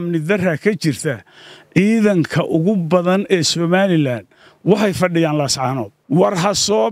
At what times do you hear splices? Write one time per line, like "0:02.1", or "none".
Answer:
0:05.9

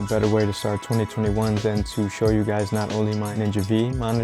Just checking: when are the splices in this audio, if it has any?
0:03.3

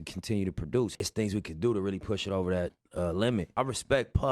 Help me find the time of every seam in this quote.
0:02.7

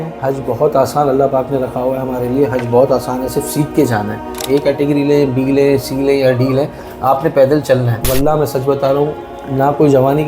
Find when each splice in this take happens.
0:04.4
0:08.0

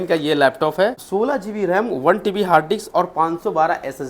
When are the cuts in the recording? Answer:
0:01.0

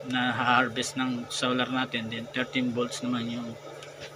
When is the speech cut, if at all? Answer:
none

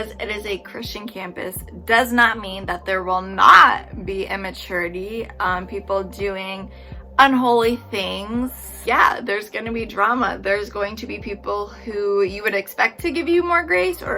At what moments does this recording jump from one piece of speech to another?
none

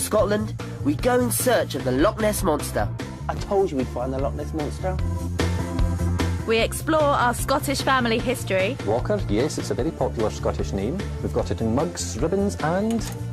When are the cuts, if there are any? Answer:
0:06.4

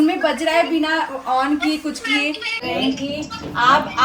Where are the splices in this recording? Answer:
0:02.6

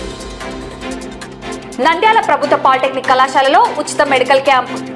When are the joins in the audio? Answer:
none

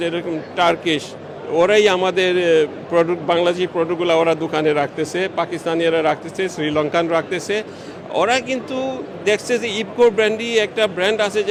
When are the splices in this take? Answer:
none

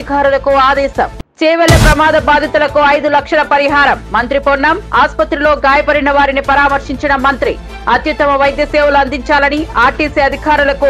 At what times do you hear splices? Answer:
0:01.2

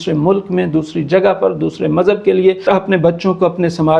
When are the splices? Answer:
0:02.6

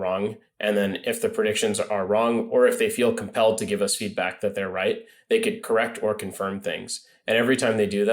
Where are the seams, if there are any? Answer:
0:05.6

